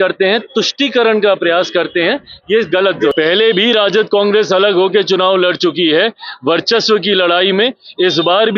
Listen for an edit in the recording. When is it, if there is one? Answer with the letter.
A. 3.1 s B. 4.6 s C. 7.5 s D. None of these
A